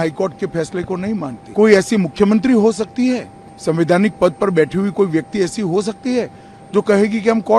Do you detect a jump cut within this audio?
yes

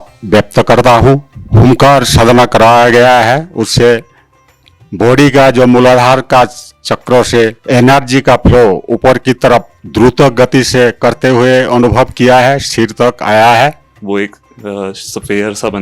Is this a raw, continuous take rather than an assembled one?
no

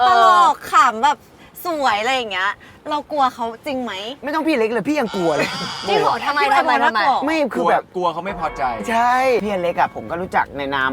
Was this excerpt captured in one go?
no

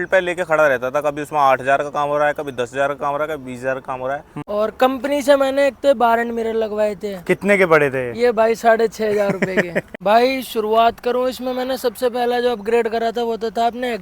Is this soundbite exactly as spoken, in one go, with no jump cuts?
no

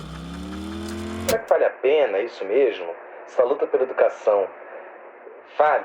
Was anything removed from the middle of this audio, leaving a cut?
yes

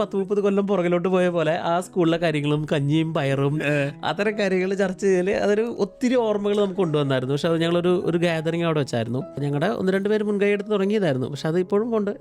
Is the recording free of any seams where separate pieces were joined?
yes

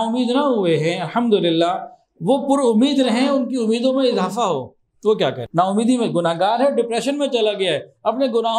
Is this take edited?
yes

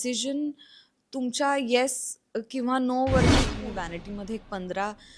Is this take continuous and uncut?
no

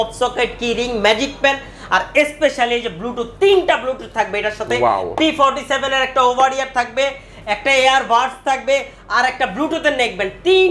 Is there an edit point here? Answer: no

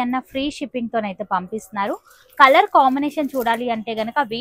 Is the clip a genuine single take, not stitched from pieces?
yes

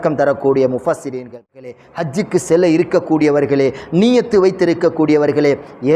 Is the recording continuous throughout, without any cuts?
no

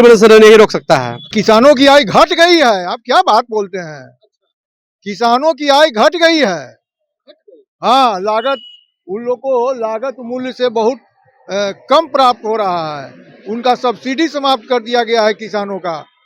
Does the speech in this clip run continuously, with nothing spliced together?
no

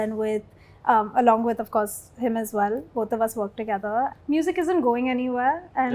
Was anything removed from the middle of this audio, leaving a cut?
yes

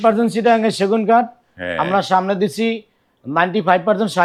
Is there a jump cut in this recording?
no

